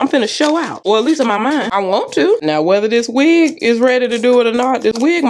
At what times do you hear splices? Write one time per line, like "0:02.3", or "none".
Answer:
none